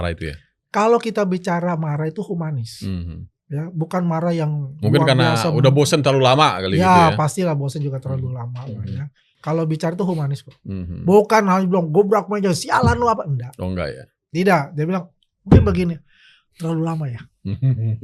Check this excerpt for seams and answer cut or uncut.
uncut